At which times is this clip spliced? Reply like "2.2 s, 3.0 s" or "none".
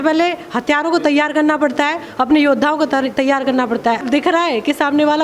4.0 s